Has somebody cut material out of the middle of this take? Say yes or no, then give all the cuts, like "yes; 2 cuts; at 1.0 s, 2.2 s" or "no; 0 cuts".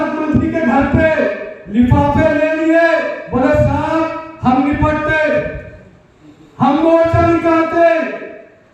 no; 0 cuts